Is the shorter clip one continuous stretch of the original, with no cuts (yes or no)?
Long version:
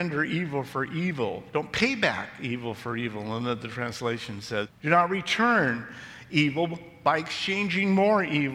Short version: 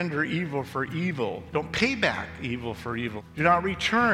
no